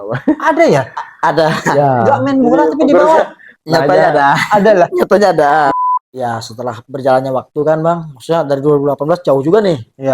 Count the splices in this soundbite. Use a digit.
1